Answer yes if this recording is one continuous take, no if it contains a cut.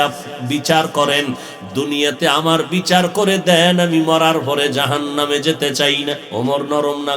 no